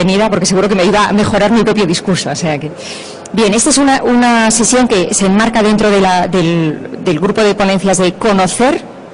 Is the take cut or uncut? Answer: cut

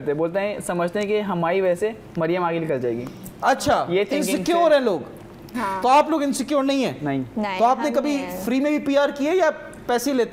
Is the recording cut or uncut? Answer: uncut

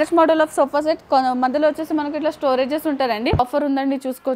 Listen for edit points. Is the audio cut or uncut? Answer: cut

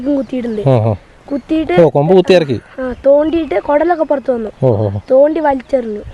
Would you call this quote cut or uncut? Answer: uncut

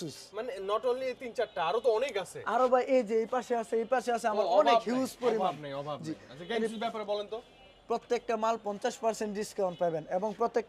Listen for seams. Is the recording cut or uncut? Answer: uncut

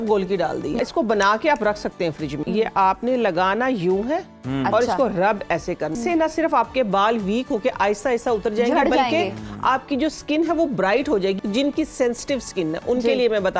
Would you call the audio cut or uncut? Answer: cut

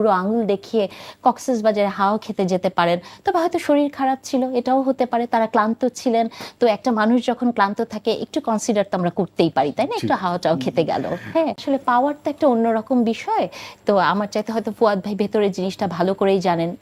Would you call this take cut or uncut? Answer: cut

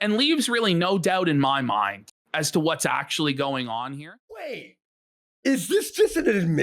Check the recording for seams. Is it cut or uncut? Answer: cut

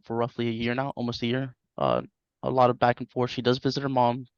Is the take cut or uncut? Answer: uncut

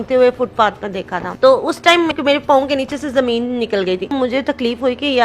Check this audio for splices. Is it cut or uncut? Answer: cut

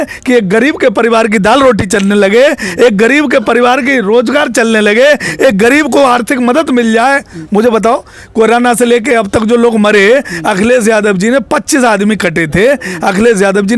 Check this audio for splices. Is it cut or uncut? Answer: uncut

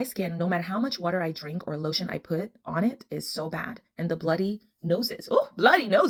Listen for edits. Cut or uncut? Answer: uncut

